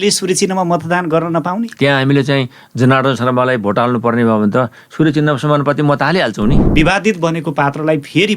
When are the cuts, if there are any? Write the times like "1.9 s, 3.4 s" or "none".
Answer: 1.7 s, 6.6 s